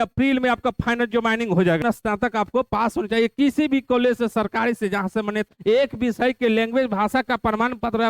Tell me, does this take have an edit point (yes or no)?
yes